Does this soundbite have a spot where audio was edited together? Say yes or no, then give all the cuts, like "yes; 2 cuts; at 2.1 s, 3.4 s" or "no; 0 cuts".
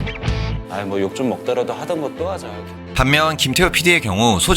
yes; 1 cut; at 2.8 s